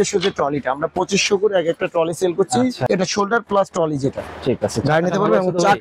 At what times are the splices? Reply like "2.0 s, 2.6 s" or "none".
2.9 s